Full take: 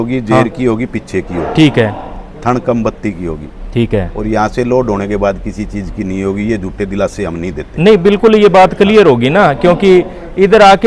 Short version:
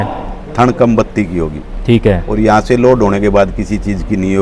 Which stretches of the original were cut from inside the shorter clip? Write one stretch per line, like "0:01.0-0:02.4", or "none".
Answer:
none

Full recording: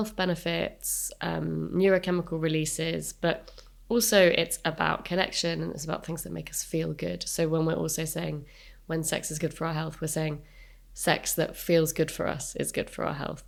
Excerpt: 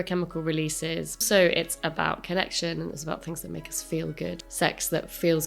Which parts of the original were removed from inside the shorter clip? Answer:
0:03.2-0:04.0
0:07.2-0:10.9

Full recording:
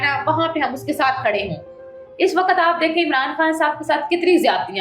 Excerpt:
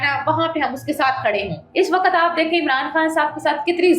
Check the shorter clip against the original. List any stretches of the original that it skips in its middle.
0:01.6-0:02.0

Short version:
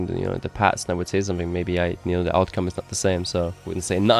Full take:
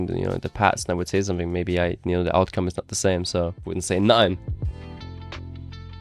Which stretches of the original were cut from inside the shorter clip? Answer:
none

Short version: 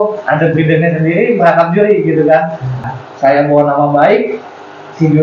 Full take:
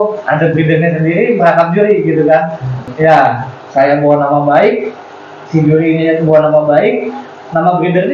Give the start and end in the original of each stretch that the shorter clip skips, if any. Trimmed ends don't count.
0:02.9-0:03.4

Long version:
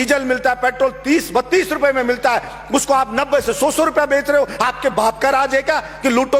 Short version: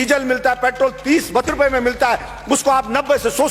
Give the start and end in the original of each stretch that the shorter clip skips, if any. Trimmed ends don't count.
0:01.5-0:01.7

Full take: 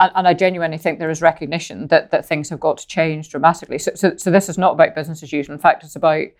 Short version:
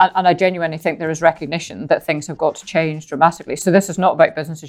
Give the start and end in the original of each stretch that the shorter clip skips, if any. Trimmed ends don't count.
0:01.8-0:02.1
0:03.8-0:04.2

